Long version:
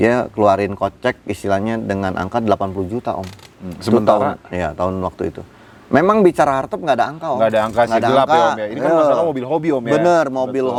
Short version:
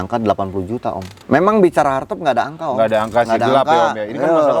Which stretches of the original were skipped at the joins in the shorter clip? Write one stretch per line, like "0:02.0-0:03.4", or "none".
0:03.3-0:05.7